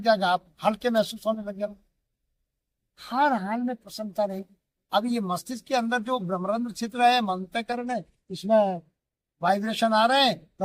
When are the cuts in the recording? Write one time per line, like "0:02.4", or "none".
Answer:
none

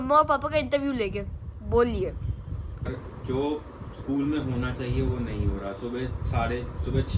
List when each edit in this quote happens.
0:02.9

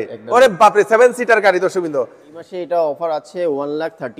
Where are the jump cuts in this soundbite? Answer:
0:02.5

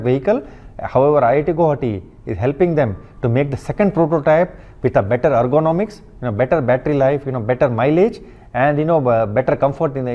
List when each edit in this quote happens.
none

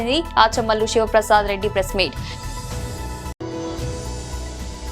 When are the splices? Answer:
0:03.3

